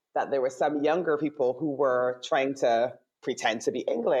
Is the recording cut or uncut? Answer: uncut